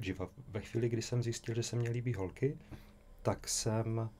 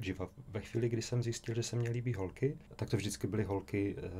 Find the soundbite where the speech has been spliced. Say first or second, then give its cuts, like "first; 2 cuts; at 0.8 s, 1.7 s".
second; 1 cut; at 2.7 s